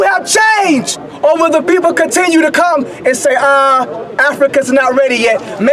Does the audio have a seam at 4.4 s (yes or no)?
no